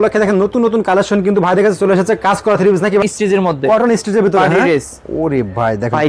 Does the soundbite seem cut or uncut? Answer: cut